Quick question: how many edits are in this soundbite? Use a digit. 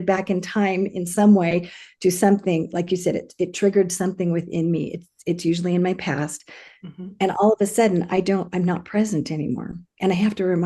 0